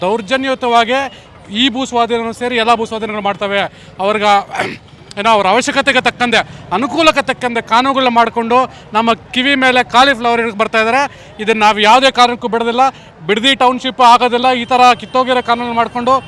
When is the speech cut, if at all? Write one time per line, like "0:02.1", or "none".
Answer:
none